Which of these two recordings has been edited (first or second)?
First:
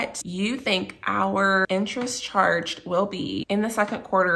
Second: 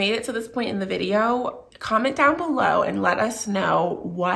first